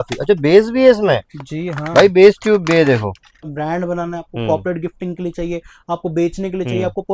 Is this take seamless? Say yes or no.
no